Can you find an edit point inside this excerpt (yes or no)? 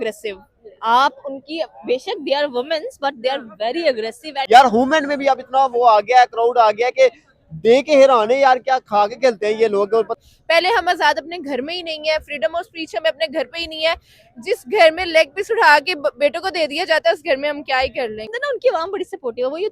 yes